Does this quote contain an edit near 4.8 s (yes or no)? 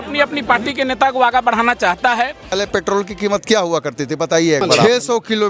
yes